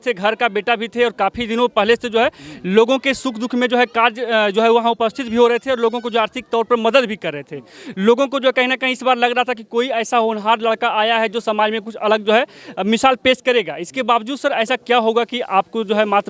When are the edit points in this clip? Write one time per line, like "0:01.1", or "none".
none